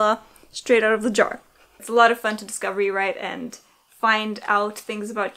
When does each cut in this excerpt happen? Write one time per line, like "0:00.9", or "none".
0:01.7